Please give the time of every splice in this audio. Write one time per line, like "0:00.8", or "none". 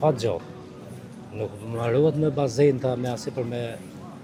none